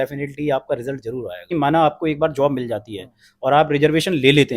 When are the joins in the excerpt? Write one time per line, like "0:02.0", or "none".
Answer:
0:01.5